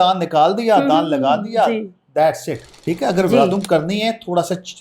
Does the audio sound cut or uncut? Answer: cut